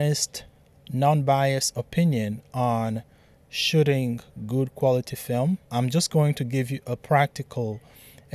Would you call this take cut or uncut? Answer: cut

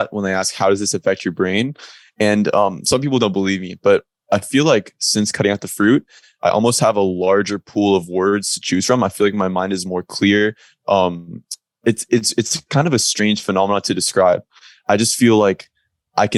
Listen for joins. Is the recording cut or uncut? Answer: uncut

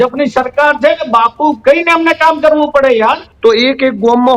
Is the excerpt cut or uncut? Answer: cut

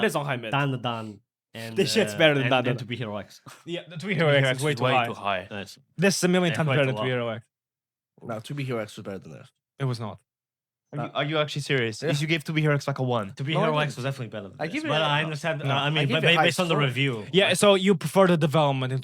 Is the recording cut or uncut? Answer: uncut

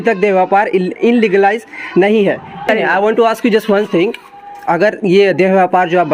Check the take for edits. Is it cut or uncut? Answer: cut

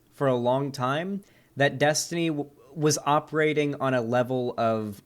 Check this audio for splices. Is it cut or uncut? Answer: uncut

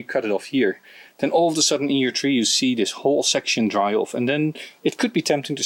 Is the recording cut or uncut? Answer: uncut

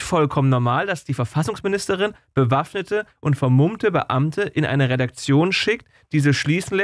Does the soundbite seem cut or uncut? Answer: uncut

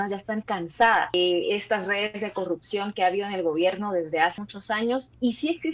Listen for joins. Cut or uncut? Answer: cut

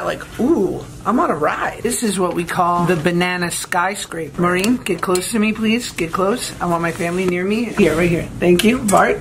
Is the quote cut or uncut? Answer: cut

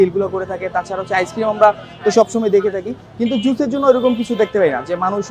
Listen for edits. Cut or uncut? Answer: uncut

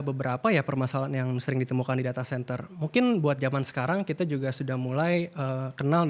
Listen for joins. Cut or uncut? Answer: uncut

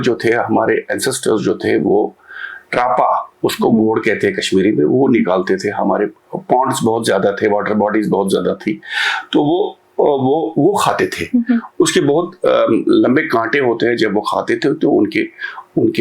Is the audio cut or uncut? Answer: uncut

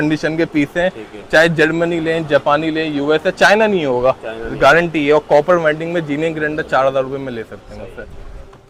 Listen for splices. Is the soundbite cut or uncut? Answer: uncut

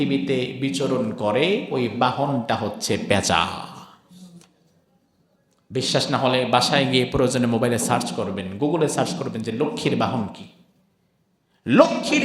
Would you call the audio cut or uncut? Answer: uncut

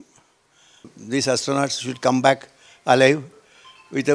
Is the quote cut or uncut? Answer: cut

